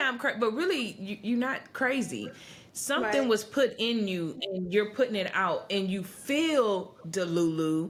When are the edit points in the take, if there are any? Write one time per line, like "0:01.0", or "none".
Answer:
none